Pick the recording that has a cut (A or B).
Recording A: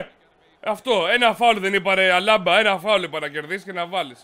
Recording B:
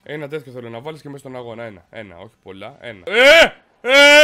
B